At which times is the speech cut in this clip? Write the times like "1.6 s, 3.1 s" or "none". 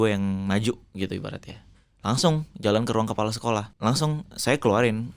3.7 s